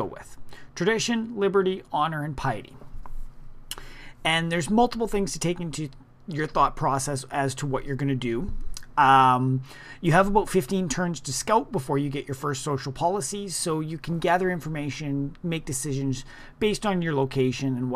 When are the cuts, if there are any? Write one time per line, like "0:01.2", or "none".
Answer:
none